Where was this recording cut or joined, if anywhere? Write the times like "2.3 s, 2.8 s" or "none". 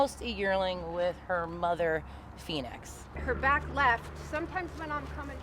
3.1 s